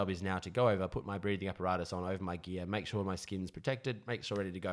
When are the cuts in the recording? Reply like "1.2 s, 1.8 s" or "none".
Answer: none